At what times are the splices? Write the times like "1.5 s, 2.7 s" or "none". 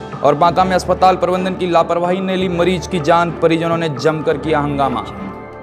none